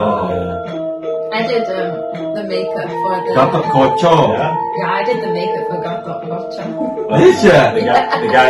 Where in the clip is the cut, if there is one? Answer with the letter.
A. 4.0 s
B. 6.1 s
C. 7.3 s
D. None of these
D